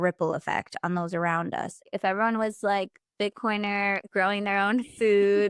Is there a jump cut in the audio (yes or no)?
yes